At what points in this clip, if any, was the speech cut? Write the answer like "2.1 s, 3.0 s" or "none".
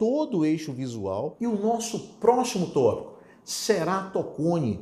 1.3 s